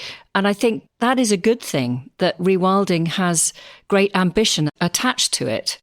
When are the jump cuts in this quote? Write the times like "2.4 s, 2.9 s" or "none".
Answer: 0.8 s, 4.7 s